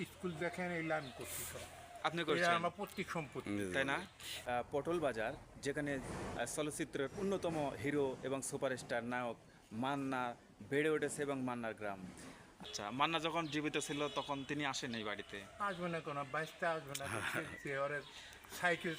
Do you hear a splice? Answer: yes; 2 cuts; at 4.4 s, 12.6 s

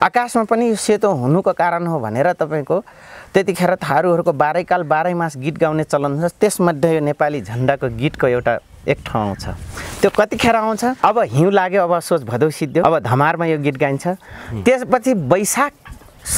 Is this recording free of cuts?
no; 2 cuts; at 11.0 s, 12.8 s

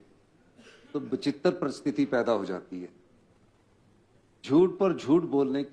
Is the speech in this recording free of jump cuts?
yes; 0 cuts

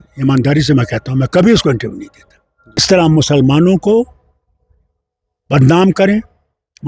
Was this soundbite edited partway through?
yes; 1 cut; at 2.8 s

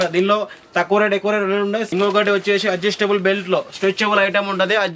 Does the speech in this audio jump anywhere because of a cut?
yes; 1 cut; at 1.9 s

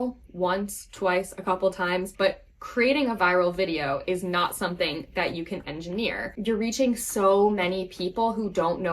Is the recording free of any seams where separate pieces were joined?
no; 2 cuts; at 2.1 s, 6.3 s

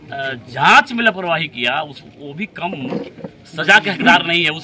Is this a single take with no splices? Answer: yes; 0 cuts

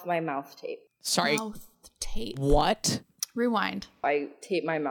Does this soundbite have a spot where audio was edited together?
yes; 2 cuts; at 0.9 s, 3.7 s

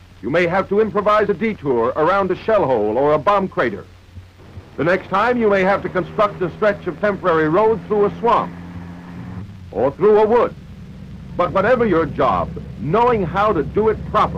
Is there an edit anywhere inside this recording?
no; 0 cuts

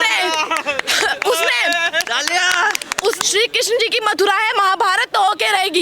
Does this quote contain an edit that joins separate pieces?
yes; 1 cut; at 3.2 s

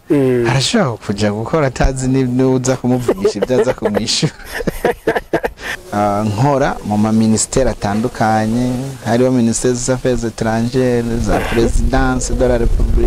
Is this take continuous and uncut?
no; 1 cut; at 5.8 s

